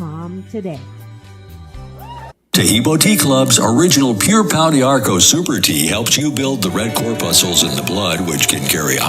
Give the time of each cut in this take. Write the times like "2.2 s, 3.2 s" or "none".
2.3 s